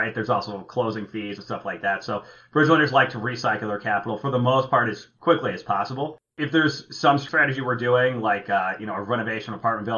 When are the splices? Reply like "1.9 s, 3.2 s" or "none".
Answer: none